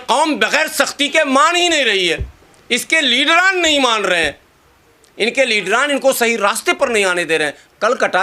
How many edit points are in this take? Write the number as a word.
zero